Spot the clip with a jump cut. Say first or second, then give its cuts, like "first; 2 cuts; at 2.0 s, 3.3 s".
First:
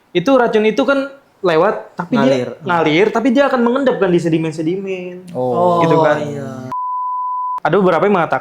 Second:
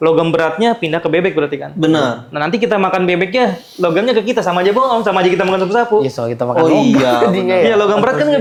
first; 1 cut; at 7.2 s